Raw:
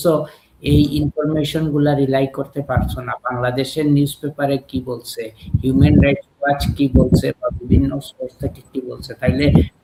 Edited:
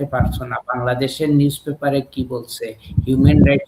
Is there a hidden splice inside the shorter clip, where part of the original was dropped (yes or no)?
no